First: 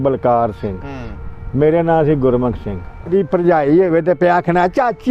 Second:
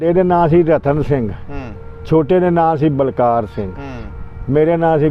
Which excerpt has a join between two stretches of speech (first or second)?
first